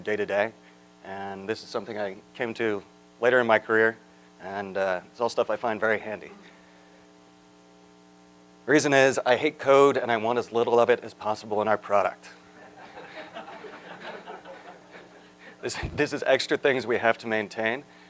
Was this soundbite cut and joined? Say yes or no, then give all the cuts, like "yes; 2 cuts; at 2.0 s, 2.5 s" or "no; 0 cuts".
no; 0 cuts